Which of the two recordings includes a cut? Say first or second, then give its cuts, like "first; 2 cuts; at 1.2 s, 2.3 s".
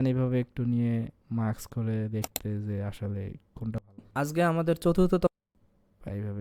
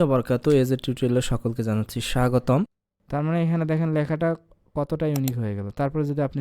second; 1 cut; at 2.7 s